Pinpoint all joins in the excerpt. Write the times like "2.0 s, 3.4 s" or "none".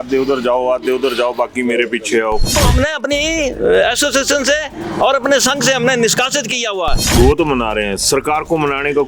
2.5 s, 7.0 s